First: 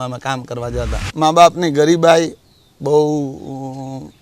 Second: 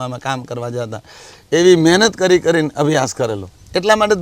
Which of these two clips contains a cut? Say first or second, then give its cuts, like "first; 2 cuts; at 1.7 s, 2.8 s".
first; 1 cut; at 1.1 s